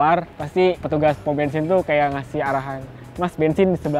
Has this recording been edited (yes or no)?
no